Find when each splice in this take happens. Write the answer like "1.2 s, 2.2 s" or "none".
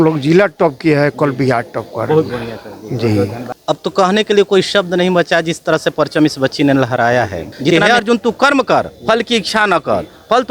3.5 s, 7.7 s